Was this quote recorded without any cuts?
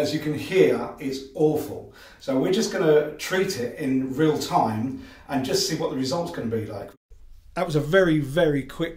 no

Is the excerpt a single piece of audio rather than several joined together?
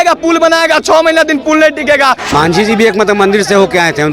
no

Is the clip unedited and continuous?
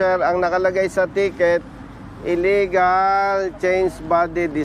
yes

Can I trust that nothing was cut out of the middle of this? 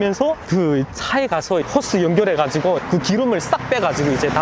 no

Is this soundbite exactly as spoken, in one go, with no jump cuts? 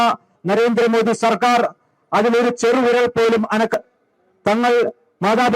no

